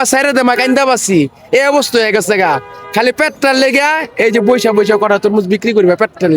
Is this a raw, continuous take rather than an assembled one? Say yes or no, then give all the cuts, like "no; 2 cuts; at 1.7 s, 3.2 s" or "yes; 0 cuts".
yes; 0 cuts